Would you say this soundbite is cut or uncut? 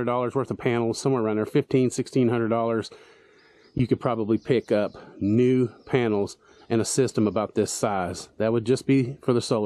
uncut